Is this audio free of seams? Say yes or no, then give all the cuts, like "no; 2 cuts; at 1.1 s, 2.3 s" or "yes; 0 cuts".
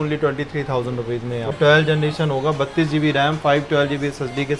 no; 1 cut; at 1.5 s